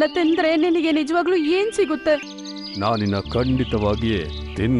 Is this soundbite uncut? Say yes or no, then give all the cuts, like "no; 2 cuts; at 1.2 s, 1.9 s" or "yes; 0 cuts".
no; 1 cut; at 2.3 s